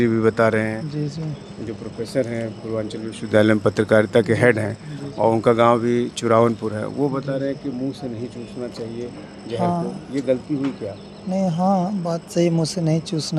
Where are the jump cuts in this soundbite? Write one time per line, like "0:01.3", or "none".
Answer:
none